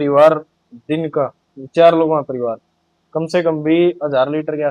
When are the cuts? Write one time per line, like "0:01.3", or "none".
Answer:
none